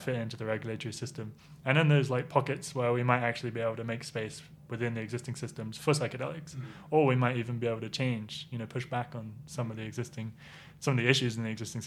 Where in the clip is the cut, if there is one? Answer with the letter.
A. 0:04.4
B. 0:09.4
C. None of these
C